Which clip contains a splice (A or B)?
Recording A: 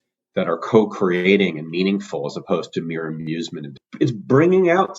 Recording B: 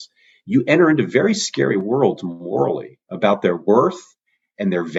A